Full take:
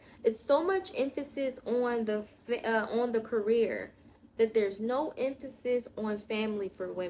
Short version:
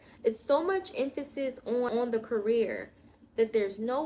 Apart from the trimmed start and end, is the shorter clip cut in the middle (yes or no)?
yes